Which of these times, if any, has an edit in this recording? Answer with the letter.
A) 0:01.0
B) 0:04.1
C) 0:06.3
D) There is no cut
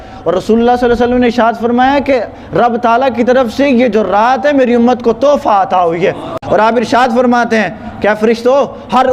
C